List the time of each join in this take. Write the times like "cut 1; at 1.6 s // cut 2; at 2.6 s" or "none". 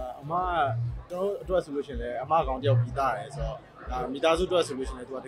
cut 1; at 1.0 s